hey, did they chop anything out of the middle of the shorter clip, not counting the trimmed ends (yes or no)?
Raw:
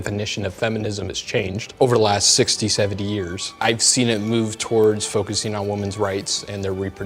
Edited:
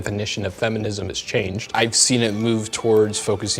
yes